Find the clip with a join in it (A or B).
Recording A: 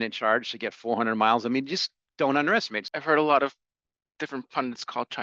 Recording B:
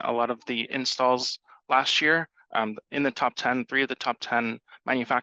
A